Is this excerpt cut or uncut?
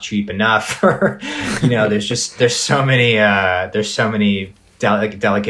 uncut